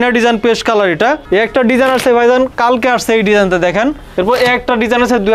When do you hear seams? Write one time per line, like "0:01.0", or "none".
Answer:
0:01.2
0:04.0